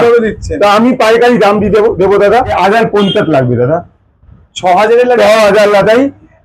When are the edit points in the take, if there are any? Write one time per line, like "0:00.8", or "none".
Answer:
0:02.5